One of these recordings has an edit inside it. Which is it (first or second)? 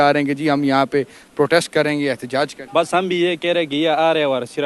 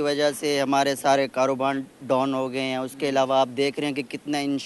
first